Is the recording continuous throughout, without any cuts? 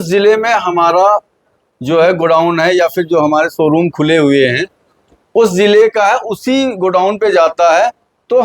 yes; 0 cuts

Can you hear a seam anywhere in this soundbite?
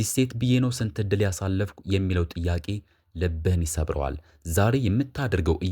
no; 0 cuts

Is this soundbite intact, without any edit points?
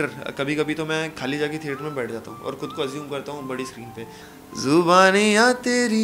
no; 1 cut; at 4.2 s

